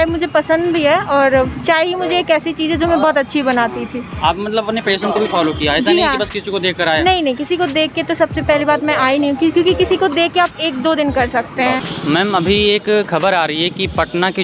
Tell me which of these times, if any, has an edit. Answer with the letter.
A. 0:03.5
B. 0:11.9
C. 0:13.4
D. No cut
B